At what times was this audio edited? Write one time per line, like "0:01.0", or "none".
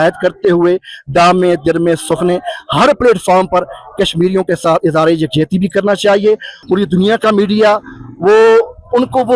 0:06.6